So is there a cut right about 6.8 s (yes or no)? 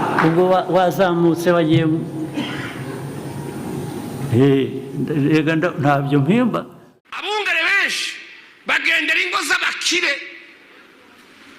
yes